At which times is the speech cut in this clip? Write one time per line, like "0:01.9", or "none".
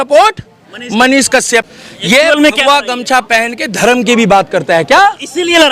0:01.7